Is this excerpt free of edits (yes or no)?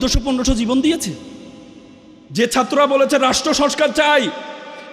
yes